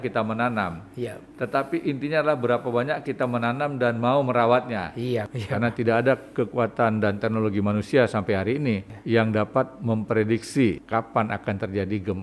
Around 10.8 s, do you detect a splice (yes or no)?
yes